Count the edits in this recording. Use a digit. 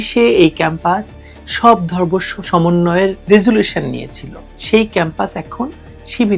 0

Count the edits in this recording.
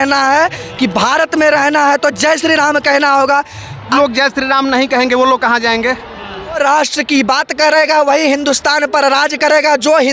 2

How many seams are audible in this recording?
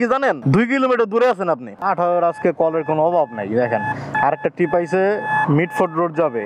1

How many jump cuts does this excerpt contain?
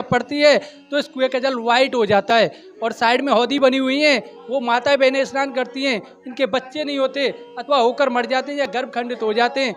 0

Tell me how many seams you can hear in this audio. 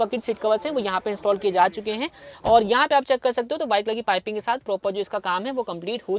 0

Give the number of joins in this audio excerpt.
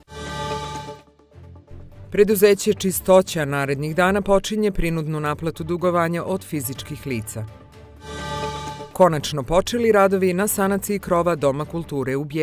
1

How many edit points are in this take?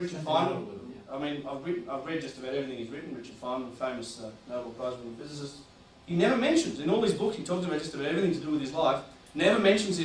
0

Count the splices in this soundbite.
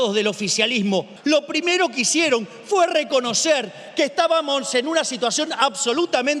1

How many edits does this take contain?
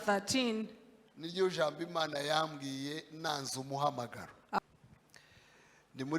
1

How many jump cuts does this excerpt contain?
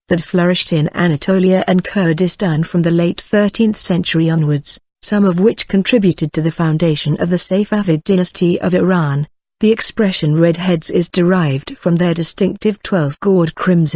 1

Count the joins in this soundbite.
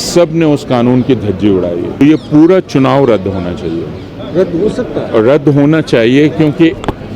1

